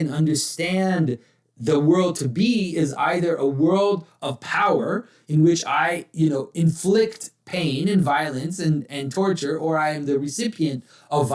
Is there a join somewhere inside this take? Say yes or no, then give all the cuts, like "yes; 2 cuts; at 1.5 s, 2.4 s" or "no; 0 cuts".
no; 0 cuts